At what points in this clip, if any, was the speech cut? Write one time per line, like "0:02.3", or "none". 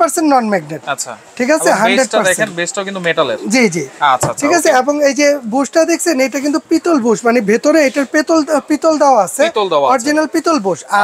none

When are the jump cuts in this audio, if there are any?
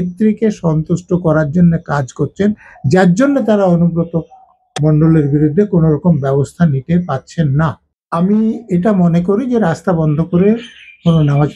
0:07.9

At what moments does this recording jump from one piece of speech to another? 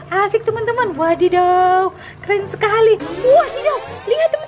0:03.1

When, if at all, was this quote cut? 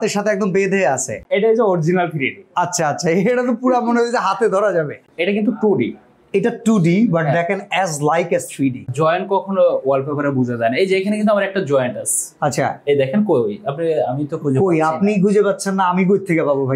0:01.2
0:05.0
0:08.9

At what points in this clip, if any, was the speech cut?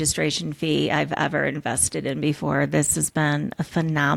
none

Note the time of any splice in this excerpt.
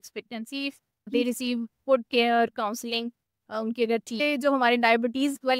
0:01.1
0:04.2

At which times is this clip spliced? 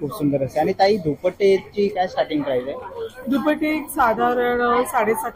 none

